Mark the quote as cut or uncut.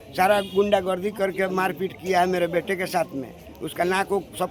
uncut